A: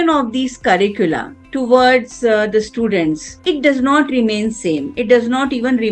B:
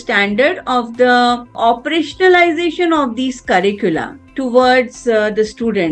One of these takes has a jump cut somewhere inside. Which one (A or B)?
B